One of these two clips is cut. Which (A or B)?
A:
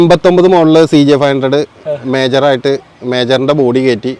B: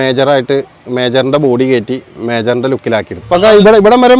B